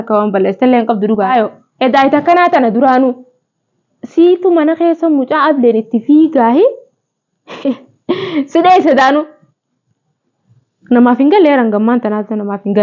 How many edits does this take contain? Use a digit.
1